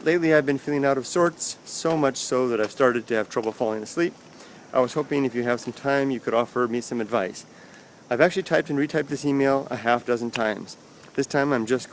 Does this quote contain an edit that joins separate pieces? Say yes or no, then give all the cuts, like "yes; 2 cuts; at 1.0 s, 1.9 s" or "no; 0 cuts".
yes; 1 cut; at 6.5 s